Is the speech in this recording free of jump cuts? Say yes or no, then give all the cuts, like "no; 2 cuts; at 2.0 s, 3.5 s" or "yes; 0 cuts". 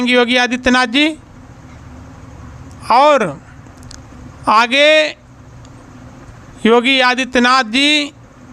yes; 0 cuts